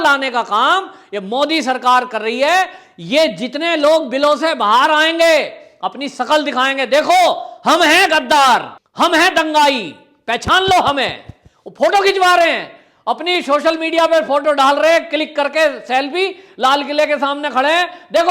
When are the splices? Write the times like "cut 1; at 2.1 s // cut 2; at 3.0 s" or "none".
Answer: cut 1; at 8.8 s